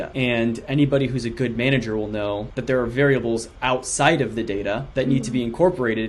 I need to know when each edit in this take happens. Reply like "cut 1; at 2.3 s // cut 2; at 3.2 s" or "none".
none